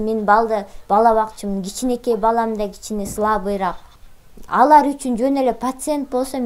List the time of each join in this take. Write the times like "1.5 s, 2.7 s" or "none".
3.9 s